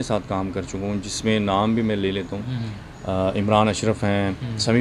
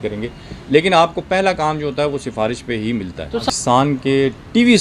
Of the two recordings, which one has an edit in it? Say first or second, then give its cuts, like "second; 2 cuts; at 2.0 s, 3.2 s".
second; 1 cut; at 3.5 s